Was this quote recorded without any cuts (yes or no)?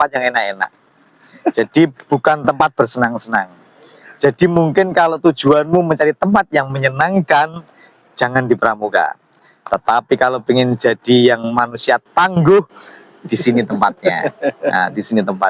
yes